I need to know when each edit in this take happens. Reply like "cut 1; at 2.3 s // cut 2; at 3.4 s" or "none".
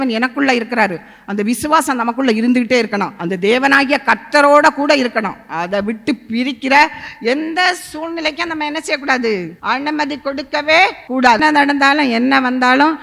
cut 1; at 3.1 s // cut 2; at 9.5 s // cut 3; at 11.4 s